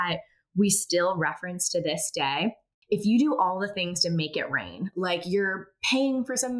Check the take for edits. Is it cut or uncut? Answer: cut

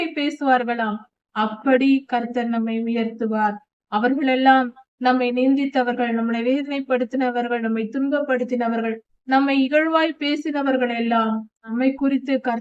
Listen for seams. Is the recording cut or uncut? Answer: cut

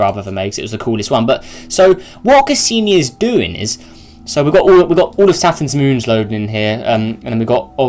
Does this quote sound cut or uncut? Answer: uncut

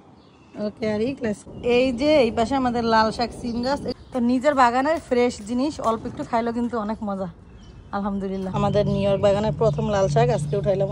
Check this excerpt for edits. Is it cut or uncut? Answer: cut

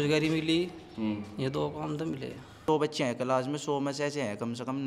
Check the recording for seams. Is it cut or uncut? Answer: cut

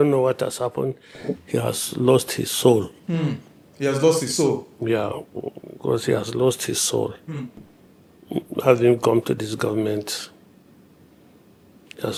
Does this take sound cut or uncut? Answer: uncut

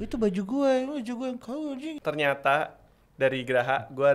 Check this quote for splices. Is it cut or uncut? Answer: cut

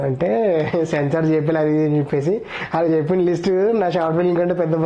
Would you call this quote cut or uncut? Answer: uncut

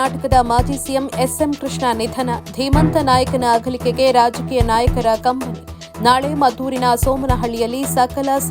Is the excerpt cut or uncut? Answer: uncut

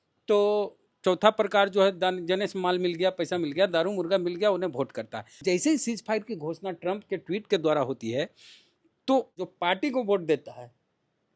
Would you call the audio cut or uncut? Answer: cut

